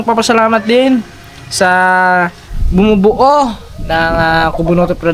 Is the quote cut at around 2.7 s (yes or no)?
no